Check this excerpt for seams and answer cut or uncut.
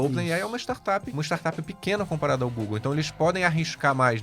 cut